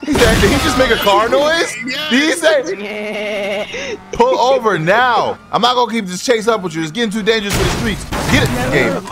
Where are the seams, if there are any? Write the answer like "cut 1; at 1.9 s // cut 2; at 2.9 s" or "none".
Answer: cut 1; at 5.4 s